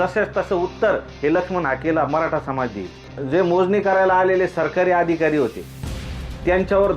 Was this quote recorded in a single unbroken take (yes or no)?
no